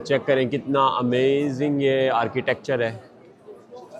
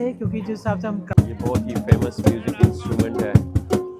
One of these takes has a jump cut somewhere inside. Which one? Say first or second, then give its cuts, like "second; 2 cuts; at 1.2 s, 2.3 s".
second; 1 cut; at 1.1 s